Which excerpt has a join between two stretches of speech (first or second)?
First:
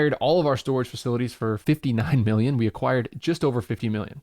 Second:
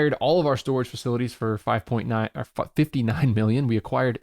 first